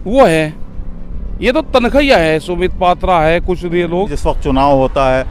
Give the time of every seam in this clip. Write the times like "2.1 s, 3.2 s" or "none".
4.1 s